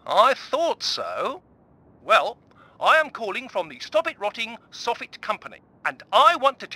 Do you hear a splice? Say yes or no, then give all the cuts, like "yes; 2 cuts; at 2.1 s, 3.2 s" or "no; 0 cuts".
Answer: yes; 1 cut; at 2.0 s